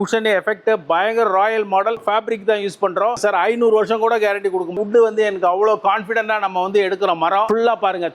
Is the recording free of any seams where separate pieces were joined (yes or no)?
no